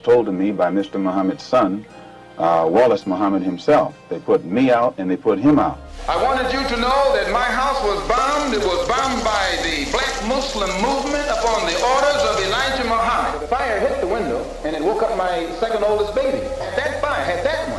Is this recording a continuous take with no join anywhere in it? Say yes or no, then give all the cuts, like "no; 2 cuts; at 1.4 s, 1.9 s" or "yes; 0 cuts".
no; 3 cuts; at 5.9 s, 13.4 s, 16.7 s